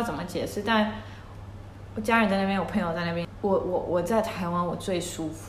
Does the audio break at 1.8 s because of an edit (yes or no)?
no